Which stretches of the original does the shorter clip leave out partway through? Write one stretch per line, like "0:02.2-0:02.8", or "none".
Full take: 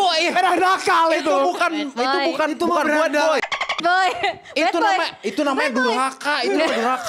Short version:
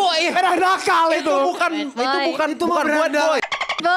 none